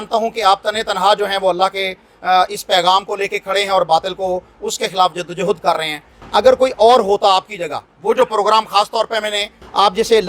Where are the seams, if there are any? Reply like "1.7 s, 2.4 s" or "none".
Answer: none